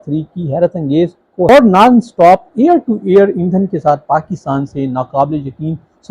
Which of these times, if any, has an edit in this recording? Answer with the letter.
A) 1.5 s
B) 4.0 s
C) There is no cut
A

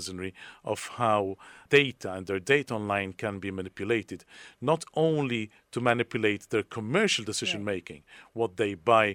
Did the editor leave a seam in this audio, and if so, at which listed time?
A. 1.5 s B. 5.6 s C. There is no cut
A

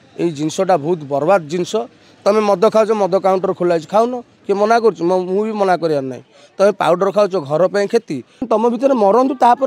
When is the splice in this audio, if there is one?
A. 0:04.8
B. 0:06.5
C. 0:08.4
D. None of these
C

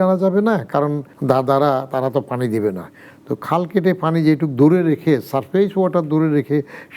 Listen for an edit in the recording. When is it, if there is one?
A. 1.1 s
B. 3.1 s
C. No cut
A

